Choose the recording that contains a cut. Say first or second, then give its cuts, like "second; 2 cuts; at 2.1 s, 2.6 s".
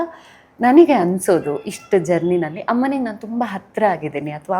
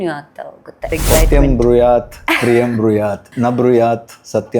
second; 2 cuts; at 0.9 s, 3.3 s